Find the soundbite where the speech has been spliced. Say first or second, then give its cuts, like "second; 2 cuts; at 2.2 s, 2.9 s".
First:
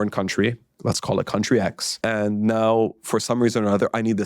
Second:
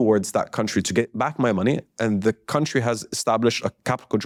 first; 1 cut; at 1.9 s